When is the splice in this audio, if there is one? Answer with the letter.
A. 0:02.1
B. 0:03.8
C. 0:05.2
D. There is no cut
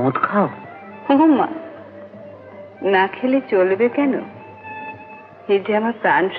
D